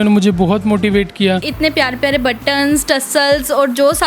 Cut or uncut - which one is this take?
cut